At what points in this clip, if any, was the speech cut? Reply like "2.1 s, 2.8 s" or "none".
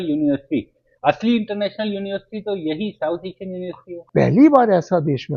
4.0 s

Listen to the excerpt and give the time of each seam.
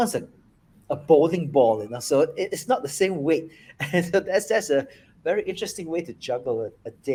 none

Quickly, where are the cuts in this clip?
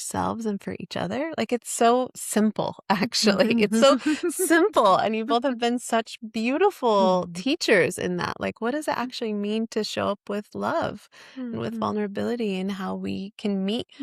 none

